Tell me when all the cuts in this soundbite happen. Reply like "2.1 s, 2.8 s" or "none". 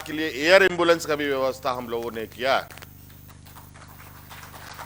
none